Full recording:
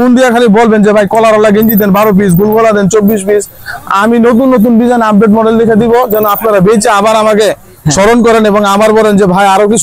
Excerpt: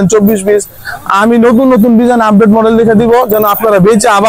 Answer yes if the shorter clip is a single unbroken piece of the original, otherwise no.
yes